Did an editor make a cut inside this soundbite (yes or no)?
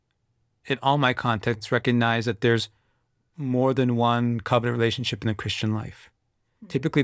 no